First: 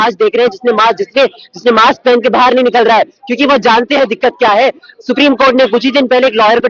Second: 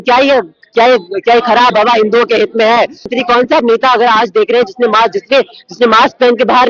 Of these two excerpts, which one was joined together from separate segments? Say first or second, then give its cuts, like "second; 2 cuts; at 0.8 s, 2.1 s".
second; 1 cut; at 3.2 s